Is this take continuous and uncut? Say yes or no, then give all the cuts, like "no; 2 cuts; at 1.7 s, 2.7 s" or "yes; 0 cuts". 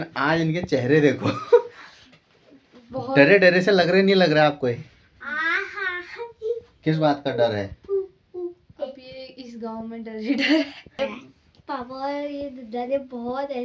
no; 1 cut; at 11.0 s